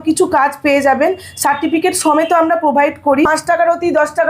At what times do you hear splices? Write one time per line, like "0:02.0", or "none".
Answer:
0:03.3

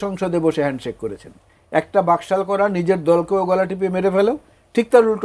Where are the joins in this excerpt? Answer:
0:01.5

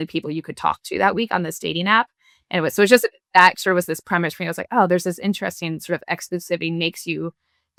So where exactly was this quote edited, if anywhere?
none

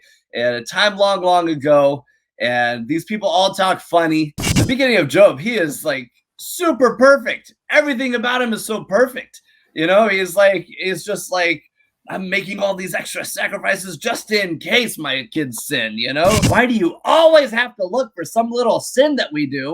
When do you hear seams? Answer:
0:04.5
0:16.4

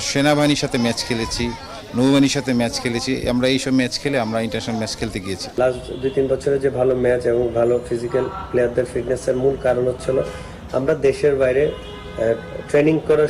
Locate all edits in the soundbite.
0:05.4

